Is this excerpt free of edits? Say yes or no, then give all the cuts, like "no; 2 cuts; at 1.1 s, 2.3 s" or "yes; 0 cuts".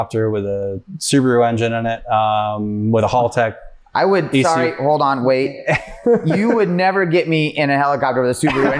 yes; 0 cuts